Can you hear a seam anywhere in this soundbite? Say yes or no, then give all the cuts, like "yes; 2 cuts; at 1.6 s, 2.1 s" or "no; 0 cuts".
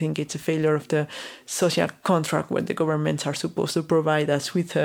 no; 0 cuts